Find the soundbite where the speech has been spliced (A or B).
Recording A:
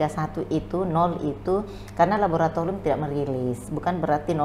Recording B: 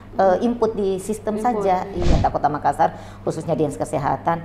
B